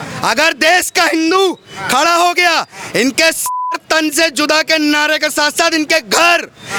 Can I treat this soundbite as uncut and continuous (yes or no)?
yes